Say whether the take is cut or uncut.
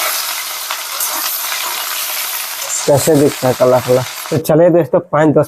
cut